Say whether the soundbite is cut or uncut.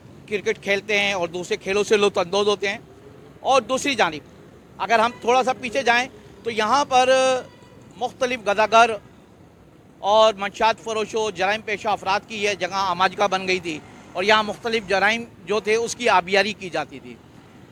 uncut